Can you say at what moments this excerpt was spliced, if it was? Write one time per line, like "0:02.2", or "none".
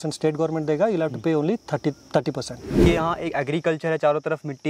0:02.9